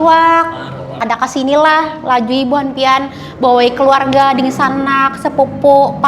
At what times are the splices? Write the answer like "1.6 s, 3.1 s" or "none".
1.0 s